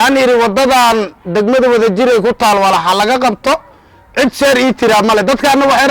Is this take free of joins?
yes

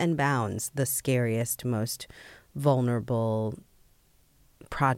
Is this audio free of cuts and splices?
yes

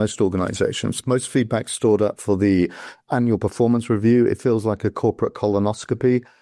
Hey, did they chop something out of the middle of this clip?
no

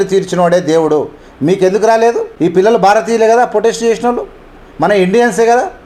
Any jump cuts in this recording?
no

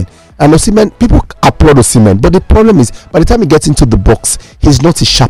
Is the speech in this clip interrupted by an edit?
no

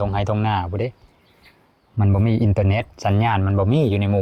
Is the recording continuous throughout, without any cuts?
yes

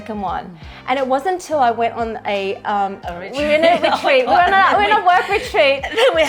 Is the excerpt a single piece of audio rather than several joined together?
yes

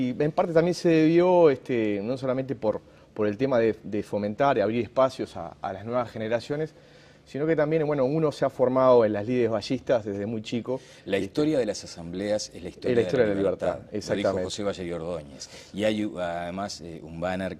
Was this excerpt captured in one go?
no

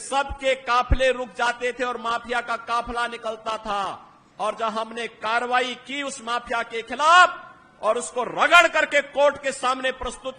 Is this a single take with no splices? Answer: yes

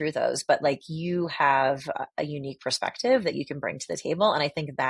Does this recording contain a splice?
no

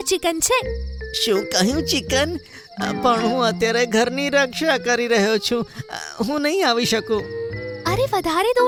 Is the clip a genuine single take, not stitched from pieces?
yes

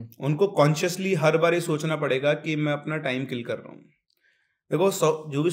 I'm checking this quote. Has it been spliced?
no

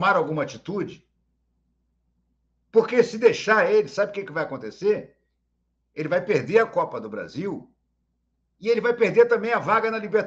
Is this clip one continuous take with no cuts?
yes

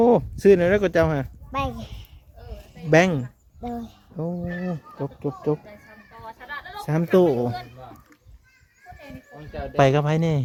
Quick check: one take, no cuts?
yes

